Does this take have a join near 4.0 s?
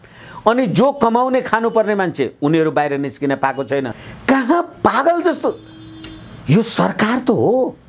yes; 1 cut; at 4.0 s

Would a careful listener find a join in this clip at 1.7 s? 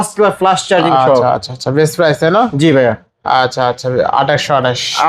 no; 0 cuts

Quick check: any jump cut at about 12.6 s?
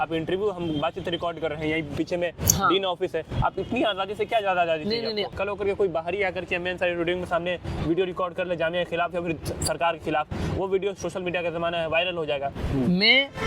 yes; 2 cuts; at 5.3 s, 12.6 s

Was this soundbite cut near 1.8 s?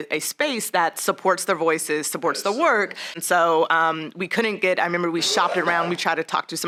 no; 1 cut; at 3.1 s

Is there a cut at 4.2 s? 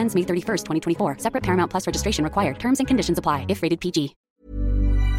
yes; 1 cut; at 4.2 s

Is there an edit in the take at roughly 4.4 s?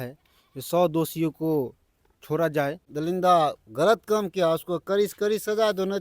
no; 1 cut; at 2.8 s

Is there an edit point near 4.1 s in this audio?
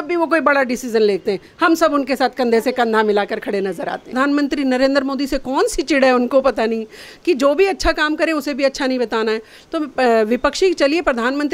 yes; 1 cut; at 4.1 s

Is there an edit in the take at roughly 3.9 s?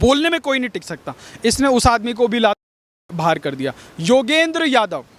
no; 0 cuts

